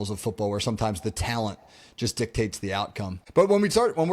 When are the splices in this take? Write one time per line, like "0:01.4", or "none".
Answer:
0:03.2